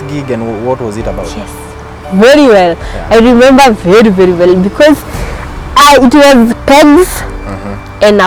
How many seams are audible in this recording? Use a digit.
0